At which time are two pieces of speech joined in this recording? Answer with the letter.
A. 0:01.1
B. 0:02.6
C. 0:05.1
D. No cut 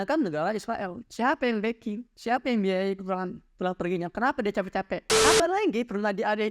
C